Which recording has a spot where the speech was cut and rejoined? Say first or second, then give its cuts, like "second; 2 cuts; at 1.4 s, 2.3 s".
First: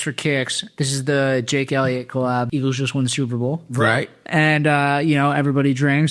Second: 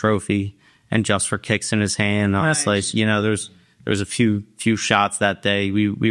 first; 1 cut; at 2.5 s